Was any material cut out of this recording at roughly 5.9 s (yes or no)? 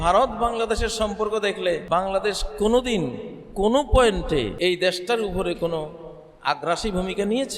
no